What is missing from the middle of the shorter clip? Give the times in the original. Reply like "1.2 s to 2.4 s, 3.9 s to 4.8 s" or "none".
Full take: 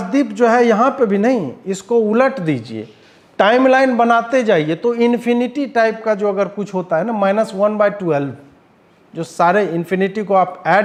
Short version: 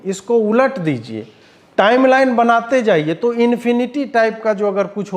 none